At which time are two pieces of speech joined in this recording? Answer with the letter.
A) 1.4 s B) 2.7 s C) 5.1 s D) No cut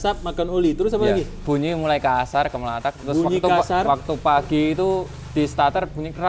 A